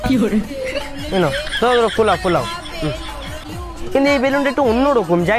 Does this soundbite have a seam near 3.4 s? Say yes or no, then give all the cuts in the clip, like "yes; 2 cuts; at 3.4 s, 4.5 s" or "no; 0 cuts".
yes; 1 cut; at 3.4 s